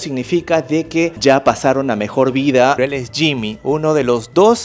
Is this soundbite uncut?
no; 2 cuts; at 1.1 s, 2.8 s

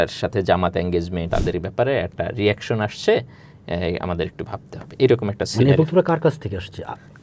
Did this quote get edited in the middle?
yes; 1 cut; at 1.3 s

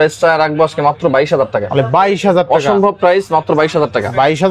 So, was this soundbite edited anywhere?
no; 0 cuts

